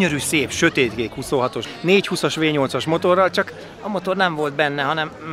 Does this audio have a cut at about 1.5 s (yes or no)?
yes